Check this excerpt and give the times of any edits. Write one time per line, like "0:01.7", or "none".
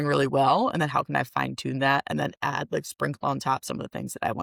none